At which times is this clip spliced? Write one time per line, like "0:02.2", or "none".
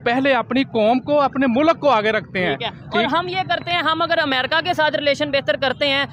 none